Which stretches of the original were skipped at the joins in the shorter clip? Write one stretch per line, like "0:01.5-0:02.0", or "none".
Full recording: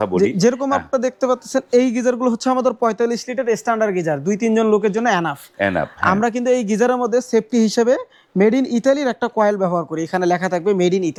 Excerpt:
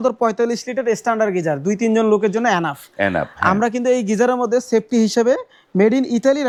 none